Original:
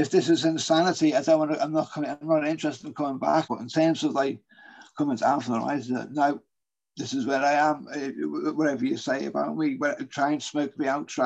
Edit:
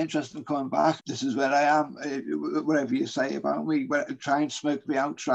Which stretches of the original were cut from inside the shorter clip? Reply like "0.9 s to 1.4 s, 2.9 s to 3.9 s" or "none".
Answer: 3.5 s to 6.9 s